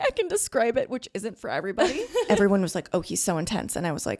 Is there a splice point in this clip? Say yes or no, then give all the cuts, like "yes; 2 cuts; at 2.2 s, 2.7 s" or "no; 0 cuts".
yes; 1 cut; at 2.3 s